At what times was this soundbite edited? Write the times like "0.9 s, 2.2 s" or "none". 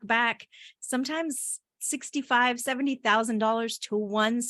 none

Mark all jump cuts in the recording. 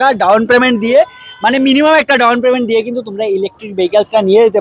none

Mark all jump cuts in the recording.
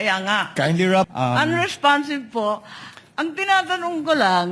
1.1 s

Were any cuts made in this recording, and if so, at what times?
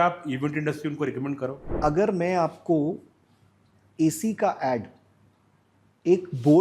1.6 s

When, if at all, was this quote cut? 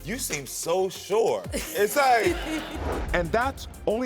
2.8 s

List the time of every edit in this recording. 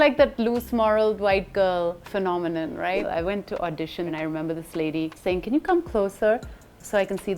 3.0 s, 4.1 s

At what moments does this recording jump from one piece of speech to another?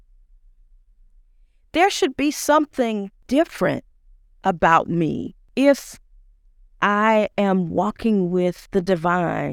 3.2 s, 5.4 s, 8.6 s

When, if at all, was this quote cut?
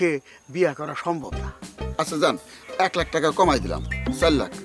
1.8 s

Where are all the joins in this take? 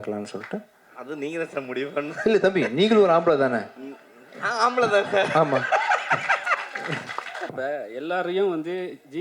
7.5 s

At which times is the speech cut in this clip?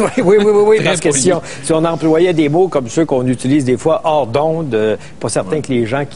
5.2 s

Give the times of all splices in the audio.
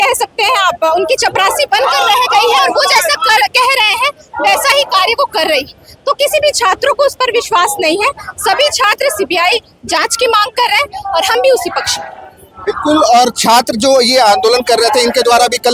none

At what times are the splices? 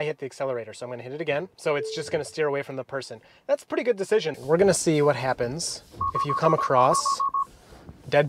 1.5 s, 4.4 s

